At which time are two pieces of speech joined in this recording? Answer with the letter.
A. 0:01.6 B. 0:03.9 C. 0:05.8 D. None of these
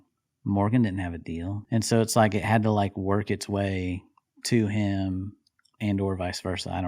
A